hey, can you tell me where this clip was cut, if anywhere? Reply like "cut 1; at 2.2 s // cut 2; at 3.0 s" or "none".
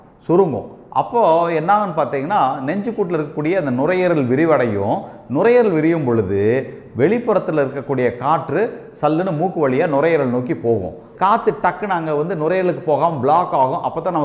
cut 1; at 11.0 s